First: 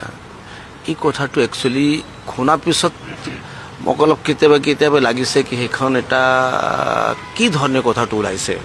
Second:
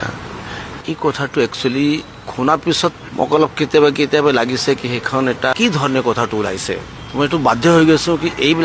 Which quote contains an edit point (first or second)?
second